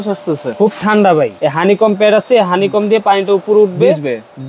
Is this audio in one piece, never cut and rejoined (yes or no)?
no